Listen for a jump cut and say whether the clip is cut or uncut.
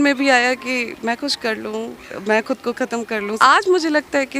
cut